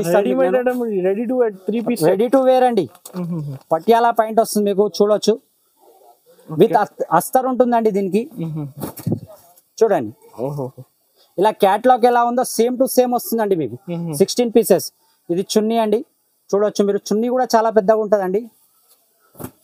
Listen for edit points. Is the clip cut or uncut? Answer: uncut